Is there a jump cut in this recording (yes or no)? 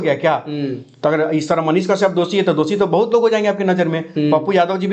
no